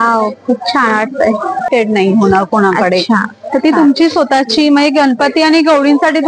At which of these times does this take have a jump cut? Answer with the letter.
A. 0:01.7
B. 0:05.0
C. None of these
A